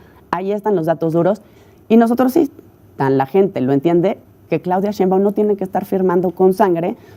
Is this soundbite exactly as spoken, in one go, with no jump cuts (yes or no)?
yes